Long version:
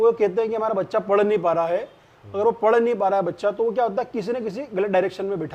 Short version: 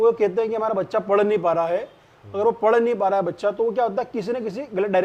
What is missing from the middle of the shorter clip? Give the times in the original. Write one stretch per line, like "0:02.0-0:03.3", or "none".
none